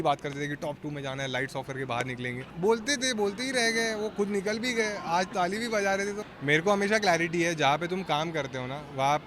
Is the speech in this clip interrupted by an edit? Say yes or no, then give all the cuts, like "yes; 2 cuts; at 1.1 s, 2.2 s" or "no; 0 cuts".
yes; 2 cuts; at 2.5 s, 6.2 s